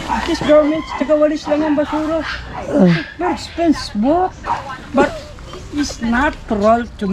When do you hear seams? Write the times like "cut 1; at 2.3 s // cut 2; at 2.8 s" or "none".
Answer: none

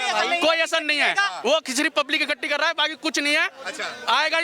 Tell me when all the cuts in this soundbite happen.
none

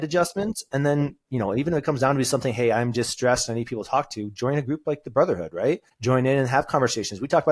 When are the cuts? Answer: cut 1; at 5.9 s

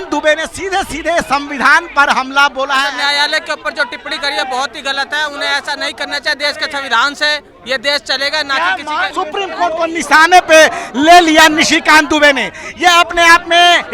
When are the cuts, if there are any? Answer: cut 1; at 2.9 s // cut 2; at 9.1 s

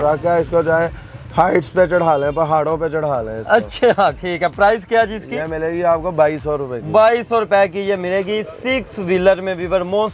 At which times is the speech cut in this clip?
none

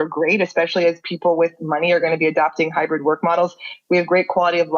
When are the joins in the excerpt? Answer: none

